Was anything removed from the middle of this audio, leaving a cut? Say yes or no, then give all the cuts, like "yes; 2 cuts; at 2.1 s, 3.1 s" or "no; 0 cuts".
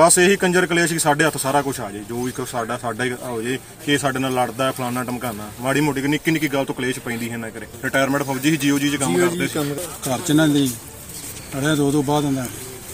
yes; 2 cuts; at 7.8 s, 9.7 s